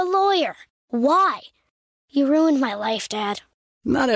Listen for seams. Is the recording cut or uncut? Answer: uncut